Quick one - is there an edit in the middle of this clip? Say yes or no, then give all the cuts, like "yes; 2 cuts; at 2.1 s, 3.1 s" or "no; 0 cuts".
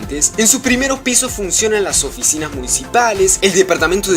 no; 0 cuts